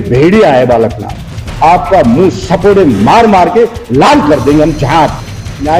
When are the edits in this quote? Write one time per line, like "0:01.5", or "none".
0:01.5